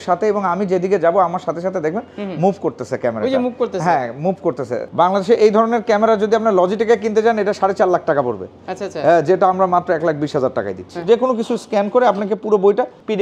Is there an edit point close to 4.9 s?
yes; 2 cuts; at 4.9 s, 11.0 s

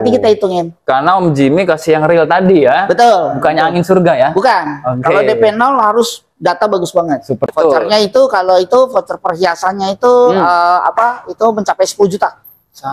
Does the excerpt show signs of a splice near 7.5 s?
yes; 1 cut; at 7.5 s

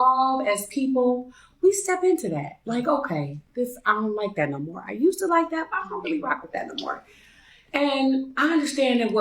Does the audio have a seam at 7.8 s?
yes; 1 cut; at 7.8 s

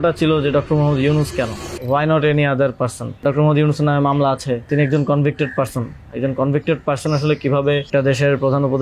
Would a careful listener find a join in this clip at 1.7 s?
yes; 4 cuts; at 1.7 s, 3.2 s, 4.7 s, 7.9 s

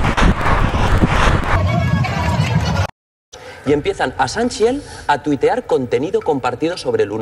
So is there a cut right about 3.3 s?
yes; 1 cut; at 3.3 s

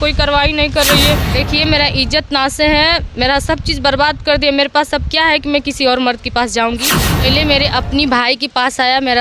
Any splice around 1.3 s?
yes; 2 cuts; at 1.3 s, 7.2 s

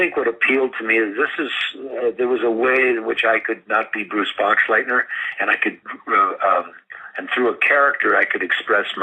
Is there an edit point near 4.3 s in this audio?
yes; 1 cut; at 4.3 s

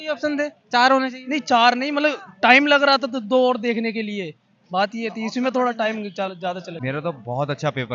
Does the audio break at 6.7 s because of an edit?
yes; 1 cut; at 6.7 s

